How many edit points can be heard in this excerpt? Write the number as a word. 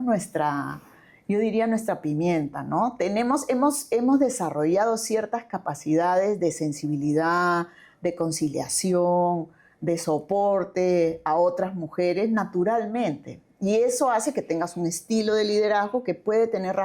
zero